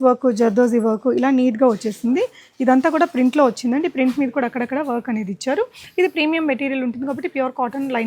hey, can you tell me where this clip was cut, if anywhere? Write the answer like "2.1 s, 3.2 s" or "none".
none